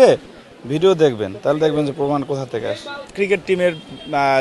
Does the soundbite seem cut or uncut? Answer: cut